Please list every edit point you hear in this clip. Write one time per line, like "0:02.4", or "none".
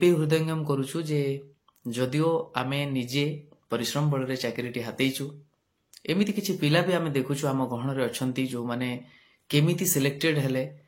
none